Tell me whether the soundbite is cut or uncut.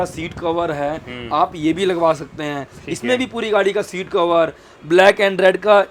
uncut